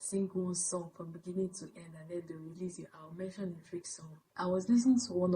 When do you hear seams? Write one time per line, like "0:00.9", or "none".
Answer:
0:04.2